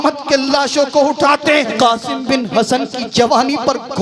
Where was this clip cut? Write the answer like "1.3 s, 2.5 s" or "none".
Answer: 1.7 s